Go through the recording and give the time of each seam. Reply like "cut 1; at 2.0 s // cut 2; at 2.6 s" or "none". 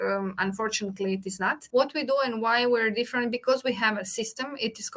cut 1; at 1.6 s